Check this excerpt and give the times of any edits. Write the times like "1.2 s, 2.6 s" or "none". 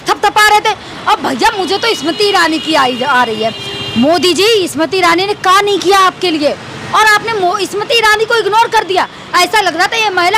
none